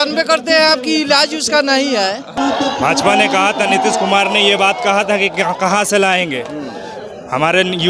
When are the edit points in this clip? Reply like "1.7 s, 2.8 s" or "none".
2.4 s